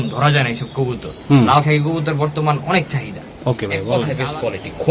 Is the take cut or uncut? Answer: cut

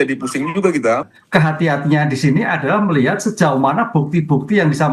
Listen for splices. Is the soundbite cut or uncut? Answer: cut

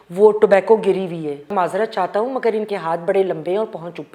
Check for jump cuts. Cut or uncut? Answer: cut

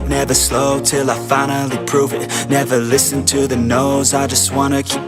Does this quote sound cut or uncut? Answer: uncut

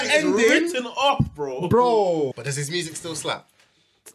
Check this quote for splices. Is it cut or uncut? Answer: cut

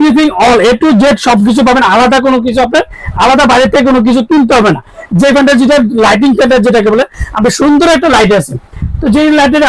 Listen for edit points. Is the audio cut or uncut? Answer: uncut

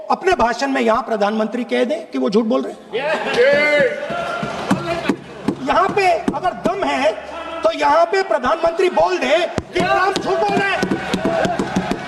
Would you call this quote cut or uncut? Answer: uncut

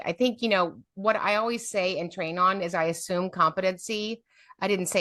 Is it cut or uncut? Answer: uncut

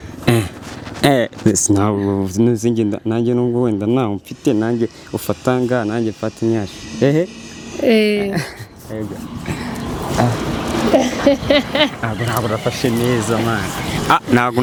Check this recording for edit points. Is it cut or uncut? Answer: uncut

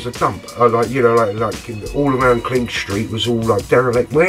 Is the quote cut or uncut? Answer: uncut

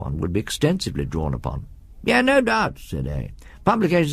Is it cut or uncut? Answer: cut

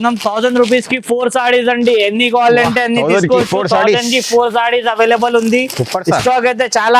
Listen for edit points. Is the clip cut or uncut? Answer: uncut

